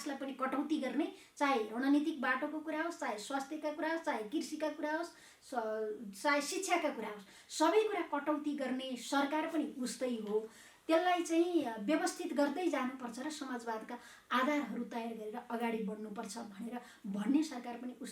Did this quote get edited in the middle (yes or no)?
no